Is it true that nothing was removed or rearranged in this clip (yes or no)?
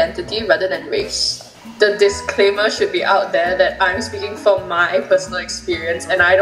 no